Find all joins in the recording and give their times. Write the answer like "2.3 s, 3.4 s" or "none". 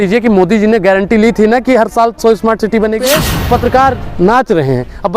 3.0 s